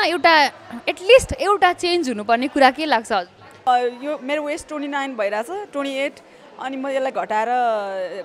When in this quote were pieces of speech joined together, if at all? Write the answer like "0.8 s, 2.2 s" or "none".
3.7 s